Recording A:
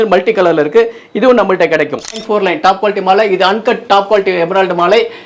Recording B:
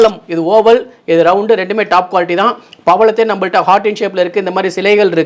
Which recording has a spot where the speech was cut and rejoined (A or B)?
A